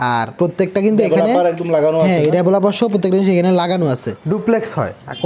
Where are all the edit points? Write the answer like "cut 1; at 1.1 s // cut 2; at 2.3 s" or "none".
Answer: cut 1; at 4.1 s